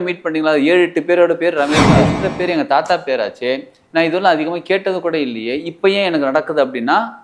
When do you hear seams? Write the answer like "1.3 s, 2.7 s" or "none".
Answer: 2.1 s

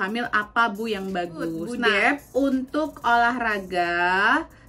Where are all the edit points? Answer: 1.7 s

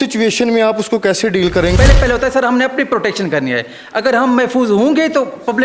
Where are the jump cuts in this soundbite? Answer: 1.7 s

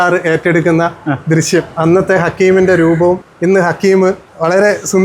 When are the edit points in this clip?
3.3 s

